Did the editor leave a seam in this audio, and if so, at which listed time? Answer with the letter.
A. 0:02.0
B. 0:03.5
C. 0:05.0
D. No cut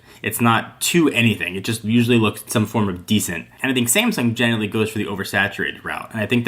B